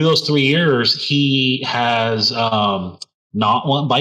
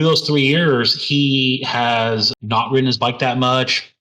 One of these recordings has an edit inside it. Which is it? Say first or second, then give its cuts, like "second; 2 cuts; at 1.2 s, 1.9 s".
second; 1 cut; at 2.3 s